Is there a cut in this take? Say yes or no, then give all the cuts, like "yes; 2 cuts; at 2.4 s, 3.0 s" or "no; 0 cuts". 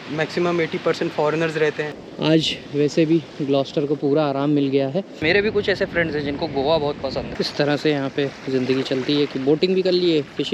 yes; 3 cuts; at 1.9 s, 5.2 s, 7.3 s